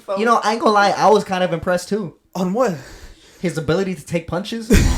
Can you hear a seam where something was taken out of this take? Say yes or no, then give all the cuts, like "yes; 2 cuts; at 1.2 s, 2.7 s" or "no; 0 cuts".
no; 0 cuts